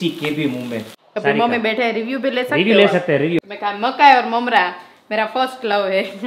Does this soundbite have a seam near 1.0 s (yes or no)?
yes